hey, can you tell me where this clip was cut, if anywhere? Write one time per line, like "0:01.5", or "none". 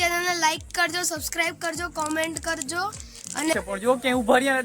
0:03.5